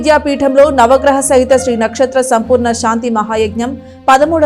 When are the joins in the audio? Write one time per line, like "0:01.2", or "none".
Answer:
none